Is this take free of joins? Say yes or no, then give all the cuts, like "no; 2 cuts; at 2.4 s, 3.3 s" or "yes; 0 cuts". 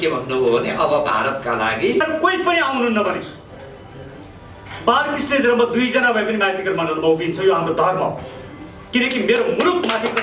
no; 1 cut; at 2.0 s